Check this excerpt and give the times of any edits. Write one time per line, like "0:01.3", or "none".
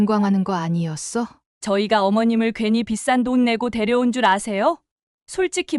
0:01.4